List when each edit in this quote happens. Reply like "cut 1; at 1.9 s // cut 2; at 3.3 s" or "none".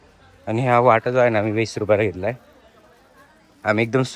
none